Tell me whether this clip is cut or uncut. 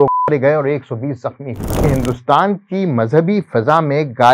cut